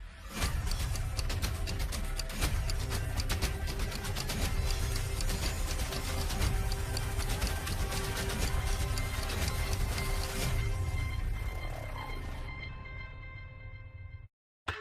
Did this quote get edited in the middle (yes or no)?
no